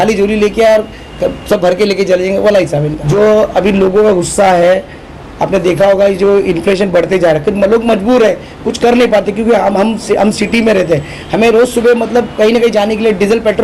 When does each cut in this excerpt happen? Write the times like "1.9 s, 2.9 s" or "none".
none